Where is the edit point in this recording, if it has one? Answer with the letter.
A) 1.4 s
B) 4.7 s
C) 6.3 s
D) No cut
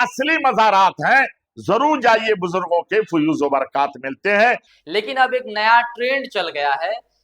B